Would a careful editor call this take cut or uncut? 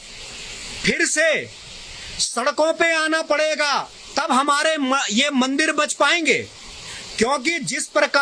uncut